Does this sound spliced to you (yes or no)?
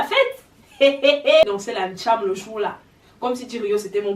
yes